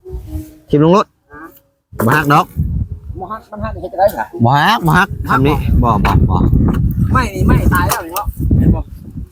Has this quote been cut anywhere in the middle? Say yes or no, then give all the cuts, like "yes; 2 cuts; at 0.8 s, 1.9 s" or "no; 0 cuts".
no; 0 cuts